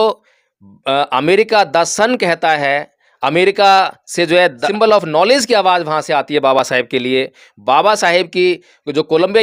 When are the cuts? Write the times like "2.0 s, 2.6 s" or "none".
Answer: 4.7 s